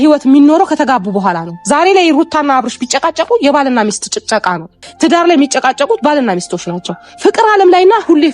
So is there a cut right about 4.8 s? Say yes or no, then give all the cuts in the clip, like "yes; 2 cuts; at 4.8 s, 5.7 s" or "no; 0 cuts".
yes; 1 cut; at 4.8 s